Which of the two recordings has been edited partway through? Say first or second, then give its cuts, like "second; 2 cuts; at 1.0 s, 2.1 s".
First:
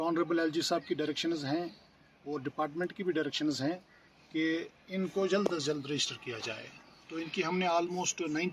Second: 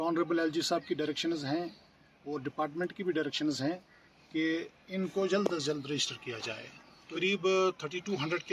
second; 1 cut; at 7.2 s